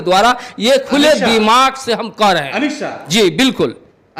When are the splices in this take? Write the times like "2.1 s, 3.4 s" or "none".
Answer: none